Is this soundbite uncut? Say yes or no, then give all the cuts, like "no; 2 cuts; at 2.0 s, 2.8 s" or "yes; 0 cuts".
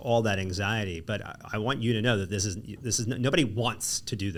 yes; 0 cuts